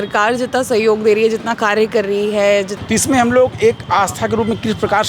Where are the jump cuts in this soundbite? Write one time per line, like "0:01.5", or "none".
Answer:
0:02.7